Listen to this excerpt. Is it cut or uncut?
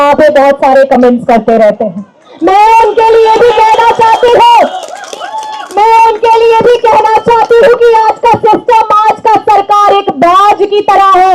uncut